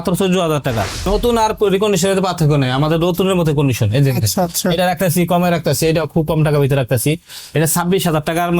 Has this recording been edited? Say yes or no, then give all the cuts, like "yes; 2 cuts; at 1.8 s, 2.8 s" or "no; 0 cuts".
yes; 1 cut; at 1.1 s